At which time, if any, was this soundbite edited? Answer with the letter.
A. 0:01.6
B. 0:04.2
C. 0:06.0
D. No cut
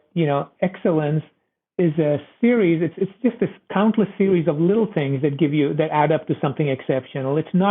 A